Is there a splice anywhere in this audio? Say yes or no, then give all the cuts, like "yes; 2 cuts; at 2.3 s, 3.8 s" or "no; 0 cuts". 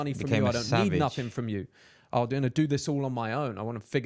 no; 0 cuts